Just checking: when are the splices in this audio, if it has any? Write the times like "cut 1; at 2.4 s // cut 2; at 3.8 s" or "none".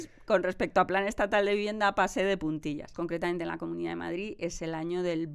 cut 1; at 2.9 s